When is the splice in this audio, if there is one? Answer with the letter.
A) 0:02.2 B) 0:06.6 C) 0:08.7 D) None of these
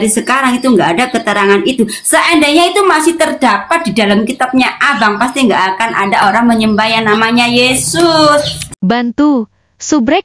C